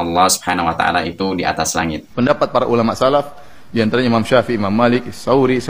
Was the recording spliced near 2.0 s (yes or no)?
yes